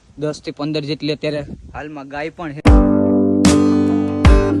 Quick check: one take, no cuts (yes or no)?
yes